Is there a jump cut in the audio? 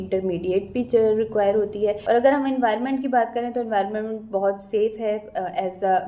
yes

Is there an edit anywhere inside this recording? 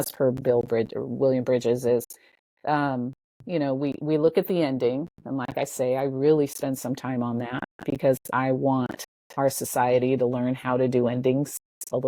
no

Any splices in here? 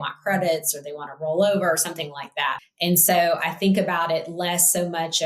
yes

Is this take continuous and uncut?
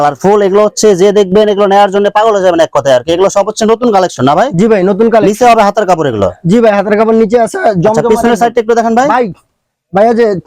yes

